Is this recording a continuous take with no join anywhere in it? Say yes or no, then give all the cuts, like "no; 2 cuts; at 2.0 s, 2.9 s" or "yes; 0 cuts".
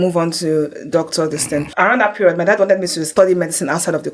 no; 2 cuts; at 1.7 s, 3.0 s